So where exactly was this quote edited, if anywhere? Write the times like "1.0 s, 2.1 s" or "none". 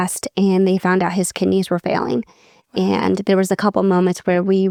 none